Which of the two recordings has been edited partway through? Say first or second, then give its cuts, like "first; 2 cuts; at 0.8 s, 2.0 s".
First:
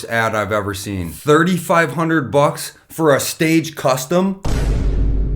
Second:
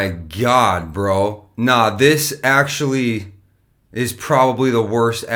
first; 2 cuts; at 1.1 s, 4.4 s